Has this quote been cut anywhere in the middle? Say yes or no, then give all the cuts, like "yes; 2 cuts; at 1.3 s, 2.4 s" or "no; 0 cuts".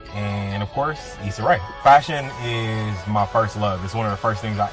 yes; 1 cut; at 3.4 s